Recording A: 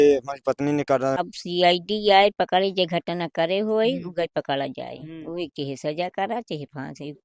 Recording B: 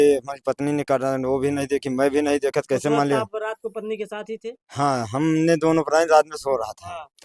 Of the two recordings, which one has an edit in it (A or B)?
A